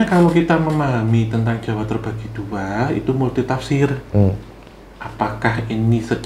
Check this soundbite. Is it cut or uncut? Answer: uncut